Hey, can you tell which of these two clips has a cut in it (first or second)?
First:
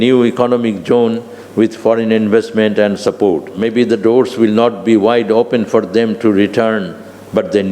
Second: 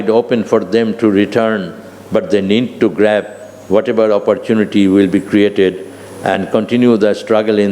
first